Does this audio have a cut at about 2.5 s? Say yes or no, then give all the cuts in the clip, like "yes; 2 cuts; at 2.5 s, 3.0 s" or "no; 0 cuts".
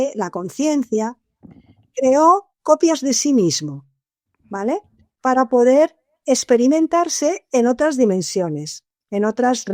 no; 0 cuts